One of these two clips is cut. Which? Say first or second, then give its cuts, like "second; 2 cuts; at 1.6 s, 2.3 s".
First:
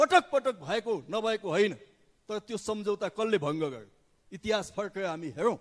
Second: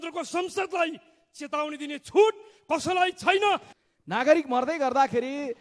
second; 1 cut; at 3.7 s